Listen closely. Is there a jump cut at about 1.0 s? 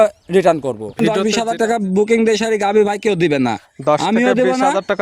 yes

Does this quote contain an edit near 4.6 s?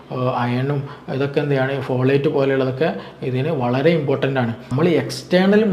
yes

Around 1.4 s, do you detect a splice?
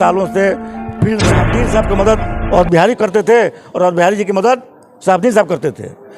yes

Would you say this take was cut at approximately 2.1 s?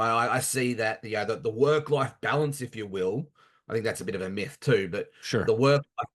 no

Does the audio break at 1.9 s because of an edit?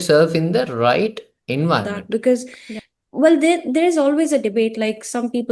yes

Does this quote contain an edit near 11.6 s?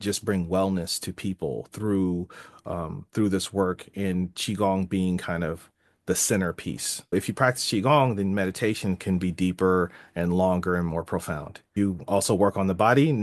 yes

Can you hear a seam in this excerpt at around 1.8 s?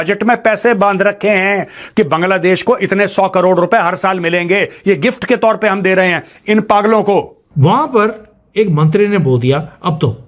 no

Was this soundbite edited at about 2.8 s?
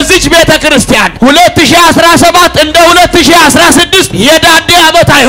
no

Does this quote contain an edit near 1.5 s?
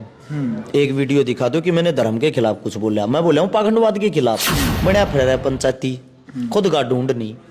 no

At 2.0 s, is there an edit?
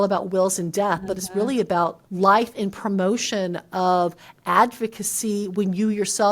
yes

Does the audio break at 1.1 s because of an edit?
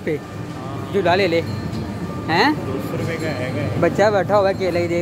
no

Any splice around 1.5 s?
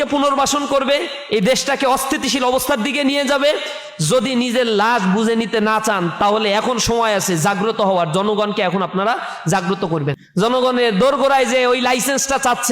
no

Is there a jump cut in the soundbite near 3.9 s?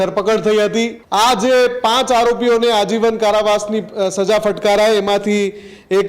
no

